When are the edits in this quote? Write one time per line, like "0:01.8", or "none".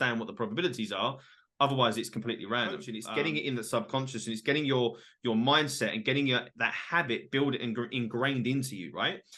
0:02.9